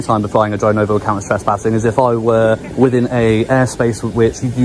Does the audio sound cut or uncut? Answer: uncut